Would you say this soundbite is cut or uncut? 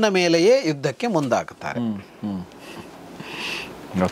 uncut